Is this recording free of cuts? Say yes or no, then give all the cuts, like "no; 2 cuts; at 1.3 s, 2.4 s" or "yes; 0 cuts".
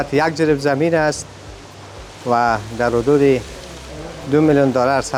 yes; 0 cuts